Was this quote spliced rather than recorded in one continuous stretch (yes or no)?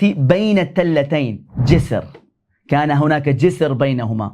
yes